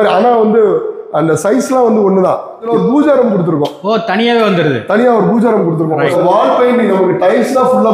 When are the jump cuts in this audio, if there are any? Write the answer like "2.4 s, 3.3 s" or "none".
2.6 s, 6.1 s